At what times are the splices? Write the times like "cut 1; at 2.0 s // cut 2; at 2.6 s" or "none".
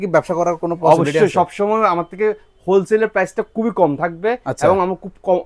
none